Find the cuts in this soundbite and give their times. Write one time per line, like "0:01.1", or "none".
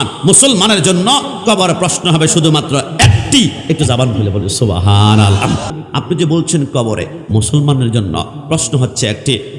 0:05.7